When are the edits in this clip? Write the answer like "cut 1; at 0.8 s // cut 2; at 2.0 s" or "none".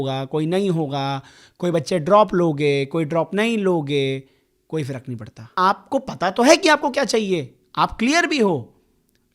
cut 1; at 5.5 s